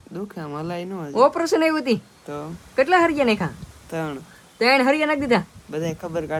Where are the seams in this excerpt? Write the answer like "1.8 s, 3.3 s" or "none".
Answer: none